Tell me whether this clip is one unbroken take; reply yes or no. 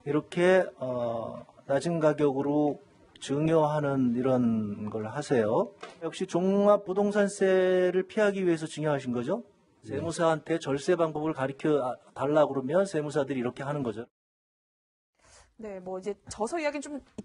yes